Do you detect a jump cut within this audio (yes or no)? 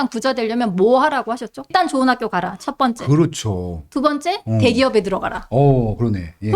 yes